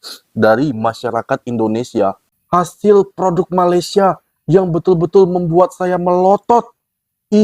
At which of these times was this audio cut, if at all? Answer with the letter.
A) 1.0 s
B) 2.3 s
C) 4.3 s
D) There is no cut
B